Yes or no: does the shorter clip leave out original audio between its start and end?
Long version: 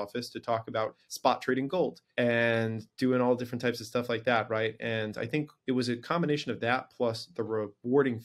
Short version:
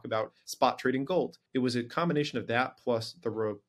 yes